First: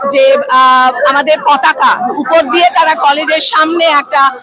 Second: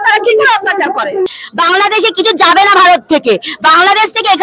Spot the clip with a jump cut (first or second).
second